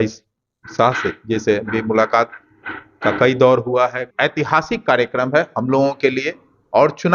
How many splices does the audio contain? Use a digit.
1